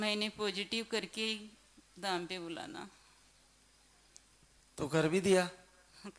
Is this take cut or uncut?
uncut